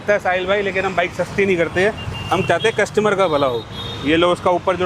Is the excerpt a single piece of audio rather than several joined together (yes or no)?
yes